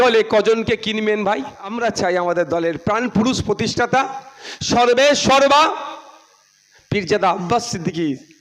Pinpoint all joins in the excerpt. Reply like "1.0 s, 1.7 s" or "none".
1.7 s